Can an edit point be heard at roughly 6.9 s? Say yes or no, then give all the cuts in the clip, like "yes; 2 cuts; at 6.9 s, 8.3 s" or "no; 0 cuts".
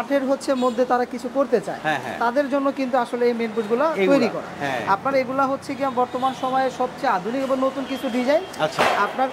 no; 0 cuts